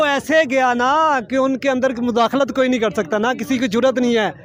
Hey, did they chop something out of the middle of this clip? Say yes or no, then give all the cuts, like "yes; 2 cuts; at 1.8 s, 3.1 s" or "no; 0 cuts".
no; 0 cuts